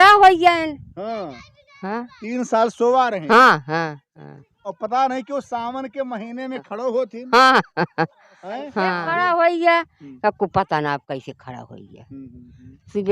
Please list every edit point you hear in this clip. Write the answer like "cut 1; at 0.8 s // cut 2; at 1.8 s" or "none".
cut 1; at 8.8 s